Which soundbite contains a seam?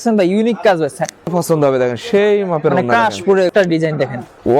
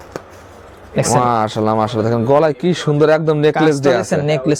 first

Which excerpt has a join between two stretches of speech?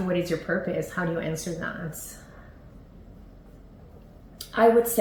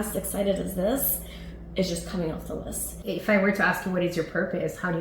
second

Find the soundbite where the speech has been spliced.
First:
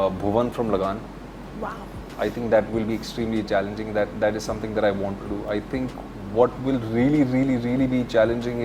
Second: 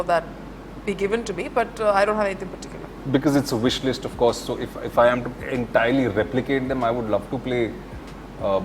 second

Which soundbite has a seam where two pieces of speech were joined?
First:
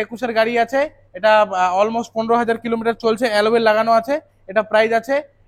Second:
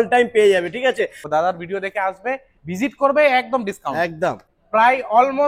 second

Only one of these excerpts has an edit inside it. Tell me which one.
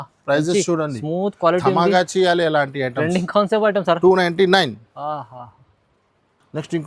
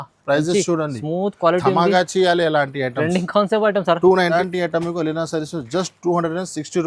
second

